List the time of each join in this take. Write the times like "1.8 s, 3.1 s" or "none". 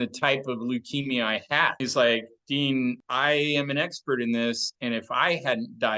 1.8 s, 3.1 s